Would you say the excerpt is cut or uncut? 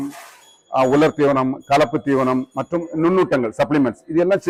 uncut